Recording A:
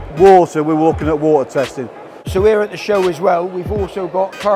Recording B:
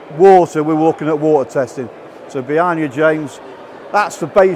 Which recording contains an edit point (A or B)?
A